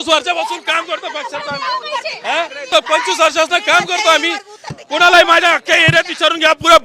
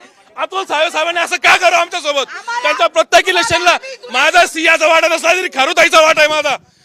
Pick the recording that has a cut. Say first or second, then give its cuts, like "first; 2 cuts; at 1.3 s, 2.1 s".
first; 1 cut; at 2.7 s